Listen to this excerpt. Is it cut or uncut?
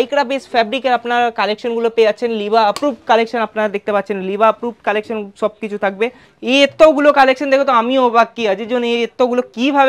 cut